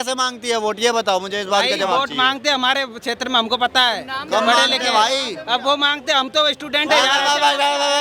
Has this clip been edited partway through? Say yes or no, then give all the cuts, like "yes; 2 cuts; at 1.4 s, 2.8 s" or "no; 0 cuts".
no; 0 cuts